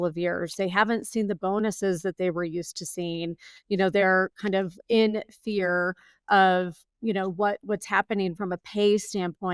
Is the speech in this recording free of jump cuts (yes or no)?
yes